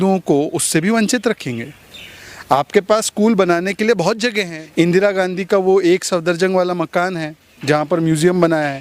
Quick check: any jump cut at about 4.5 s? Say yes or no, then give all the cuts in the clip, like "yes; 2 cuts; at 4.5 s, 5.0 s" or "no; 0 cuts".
yes; 1 cut; at 4.5 s